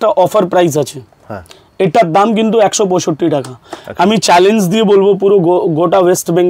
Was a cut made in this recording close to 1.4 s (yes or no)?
no